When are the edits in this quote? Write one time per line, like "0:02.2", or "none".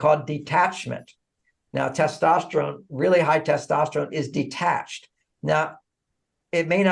none